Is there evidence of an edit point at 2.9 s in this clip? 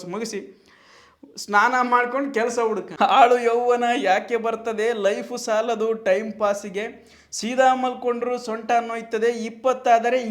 yes; 1 cut; at 2.9 s

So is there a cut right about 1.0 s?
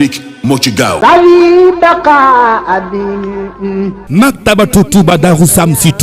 yes; 1 cut; at 1.0 s

